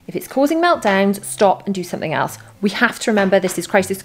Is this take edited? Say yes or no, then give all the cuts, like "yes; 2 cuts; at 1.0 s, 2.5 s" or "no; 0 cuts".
no; 0 cuts